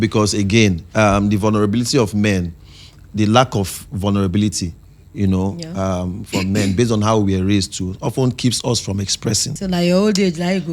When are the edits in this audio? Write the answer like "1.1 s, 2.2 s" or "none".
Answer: 9.5 s